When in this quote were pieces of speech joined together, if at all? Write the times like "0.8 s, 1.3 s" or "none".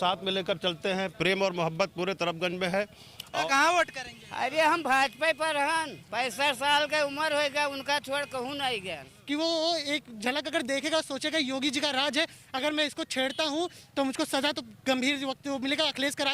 3.4 s, 9.1 s